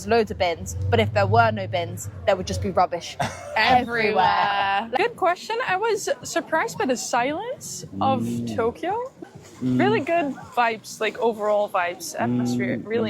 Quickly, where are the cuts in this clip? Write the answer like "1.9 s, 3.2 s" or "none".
4.9 s, 9.3 s